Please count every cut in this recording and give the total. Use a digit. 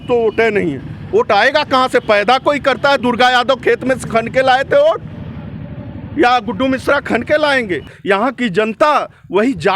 1